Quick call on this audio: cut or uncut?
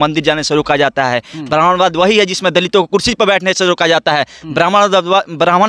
uncut